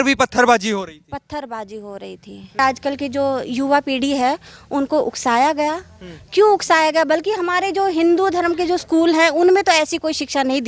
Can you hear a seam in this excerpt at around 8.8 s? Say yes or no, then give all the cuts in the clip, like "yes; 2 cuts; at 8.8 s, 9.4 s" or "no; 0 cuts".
no; 1 cut; at 2.6 s